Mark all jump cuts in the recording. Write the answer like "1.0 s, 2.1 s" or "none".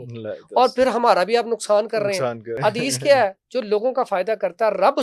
2.5 s